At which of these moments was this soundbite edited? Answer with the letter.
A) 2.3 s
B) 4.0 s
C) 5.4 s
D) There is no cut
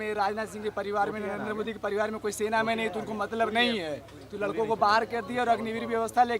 D